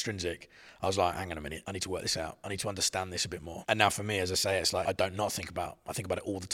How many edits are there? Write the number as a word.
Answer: three